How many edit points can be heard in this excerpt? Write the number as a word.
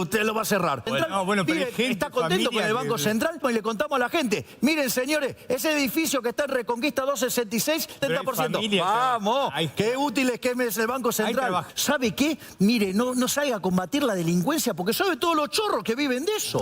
four